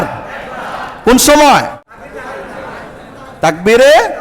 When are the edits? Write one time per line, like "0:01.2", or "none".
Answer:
0:01.8